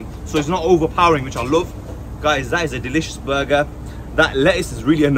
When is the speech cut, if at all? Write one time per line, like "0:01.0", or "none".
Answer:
none